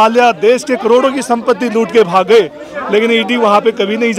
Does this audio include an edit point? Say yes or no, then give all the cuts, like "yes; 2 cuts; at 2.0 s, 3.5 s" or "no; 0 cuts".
no; 0 cuts